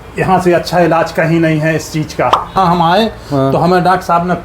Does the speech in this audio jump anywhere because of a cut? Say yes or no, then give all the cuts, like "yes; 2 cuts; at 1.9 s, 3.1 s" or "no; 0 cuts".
yes; 1 cut; at 2.5 s